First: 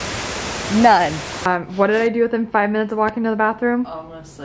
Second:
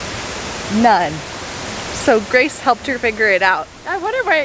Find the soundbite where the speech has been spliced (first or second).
first